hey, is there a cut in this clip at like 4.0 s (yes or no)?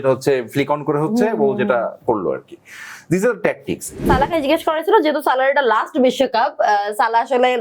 yes